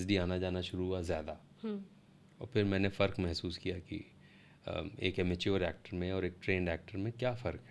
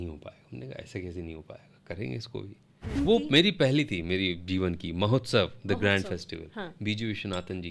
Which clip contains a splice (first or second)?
second